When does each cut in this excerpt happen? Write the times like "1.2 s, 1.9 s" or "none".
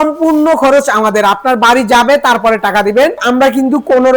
3.2 s

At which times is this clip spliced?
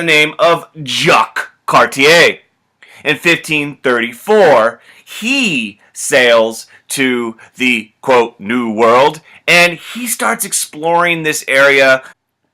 9.3 s

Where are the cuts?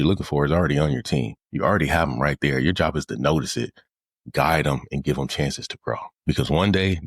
1.4 s, 6.1 s

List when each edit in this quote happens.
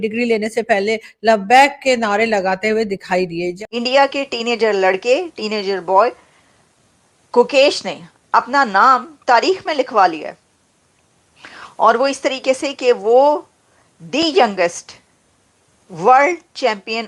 3.5 s

